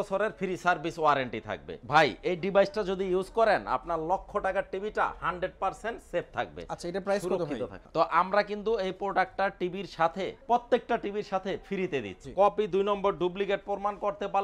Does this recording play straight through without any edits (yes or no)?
no